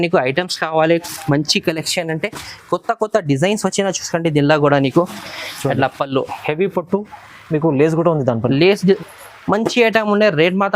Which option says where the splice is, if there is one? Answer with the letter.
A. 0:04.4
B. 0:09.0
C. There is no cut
B